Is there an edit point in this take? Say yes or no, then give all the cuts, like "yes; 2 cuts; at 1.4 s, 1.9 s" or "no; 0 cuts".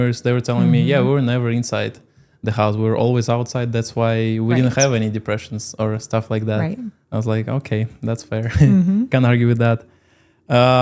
no; 0 cuts